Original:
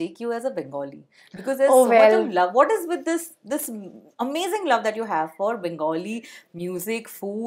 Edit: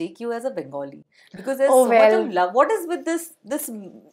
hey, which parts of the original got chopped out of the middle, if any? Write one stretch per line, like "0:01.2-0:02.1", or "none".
none

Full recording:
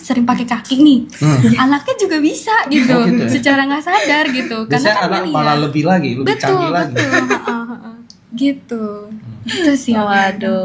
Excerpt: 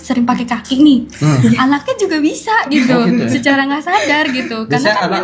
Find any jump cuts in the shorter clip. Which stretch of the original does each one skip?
none

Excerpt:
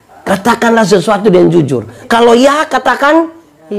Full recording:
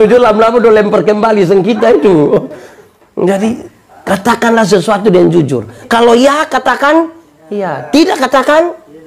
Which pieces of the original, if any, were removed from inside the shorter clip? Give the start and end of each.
none

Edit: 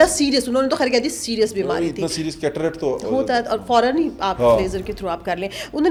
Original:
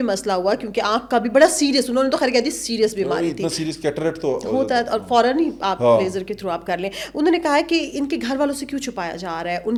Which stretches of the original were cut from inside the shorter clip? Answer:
none

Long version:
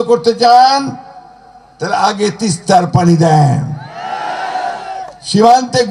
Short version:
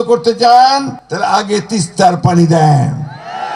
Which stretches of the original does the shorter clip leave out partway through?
0:01.0-0:01.7

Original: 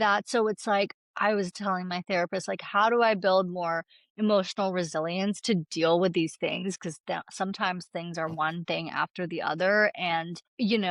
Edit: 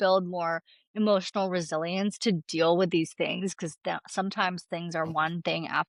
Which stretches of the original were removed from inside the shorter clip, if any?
none

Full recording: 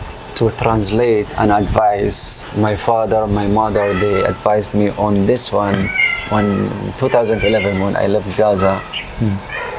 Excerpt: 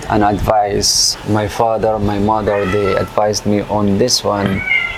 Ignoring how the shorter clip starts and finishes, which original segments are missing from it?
none

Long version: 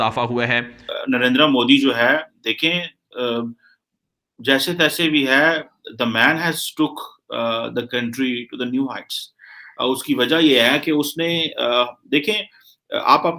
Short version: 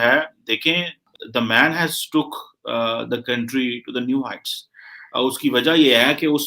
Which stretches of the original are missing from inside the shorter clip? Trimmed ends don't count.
0:03.0-0:05.7

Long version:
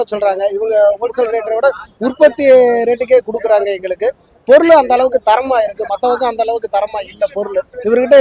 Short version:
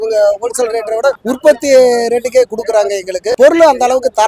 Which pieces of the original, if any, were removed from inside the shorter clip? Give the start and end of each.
0:01.8-0:02.0
0:04.0-0:04.3

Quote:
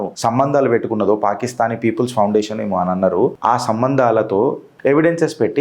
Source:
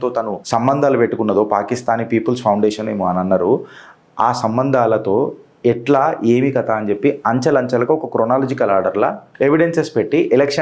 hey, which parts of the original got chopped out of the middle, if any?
0:03.6-0:04.1
0:05.4-0:09.2

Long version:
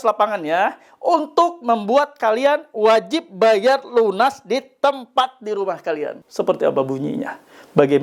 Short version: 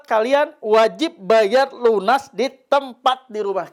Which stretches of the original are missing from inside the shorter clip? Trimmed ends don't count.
none

